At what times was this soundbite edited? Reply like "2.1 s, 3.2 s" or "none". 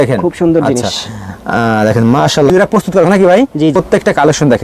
2.5 s, 3.7 s

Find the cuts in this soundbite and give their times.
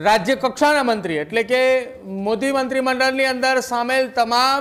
none

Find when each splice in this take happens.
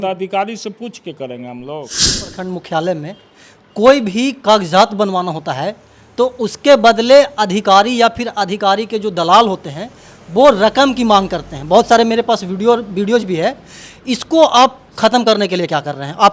2.3 s

